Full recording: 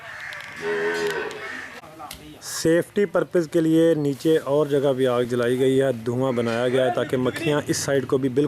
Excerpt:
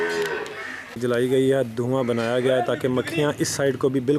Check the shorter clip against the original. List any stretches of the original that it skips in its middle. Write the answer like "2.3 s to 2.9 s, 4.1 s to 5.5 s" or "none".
1.8 s to 5.3 s